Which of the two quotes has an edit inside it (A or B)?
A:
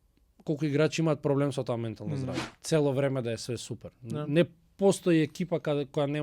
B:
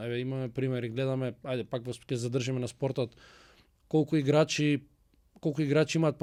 A